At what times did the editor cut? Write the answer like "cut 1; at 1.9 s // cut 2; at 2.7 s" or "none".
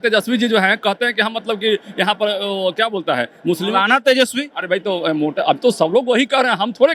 none